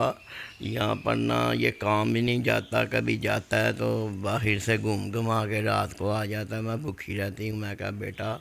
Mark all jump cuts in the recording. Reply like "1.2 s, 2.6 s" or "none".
none